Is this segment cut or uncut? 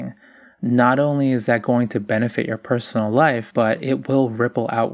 cut